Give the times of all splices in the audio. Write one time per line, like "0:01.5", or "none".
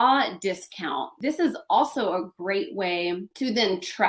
0:01.1